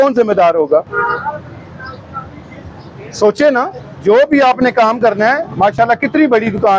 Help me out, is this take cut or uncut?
uncut